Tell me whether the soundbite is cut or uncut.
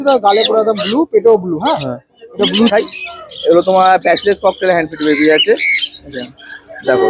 cut